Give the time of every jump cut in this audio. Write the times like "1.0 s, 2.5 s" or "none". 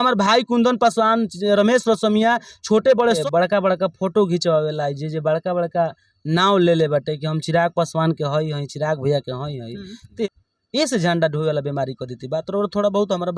3.2 s, 10.3 s